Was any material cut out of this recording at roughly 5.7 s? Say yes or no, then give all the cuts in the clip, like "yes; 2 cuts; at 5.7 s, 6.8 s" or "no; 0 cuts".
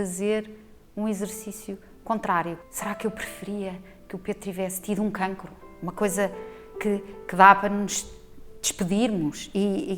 no; 1 cut; at 2.6 s